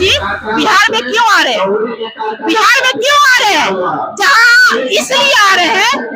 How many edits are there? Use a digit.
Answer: 0